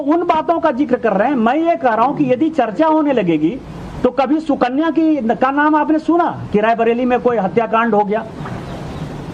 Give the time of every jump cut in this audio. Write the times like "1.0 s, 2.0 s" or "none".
none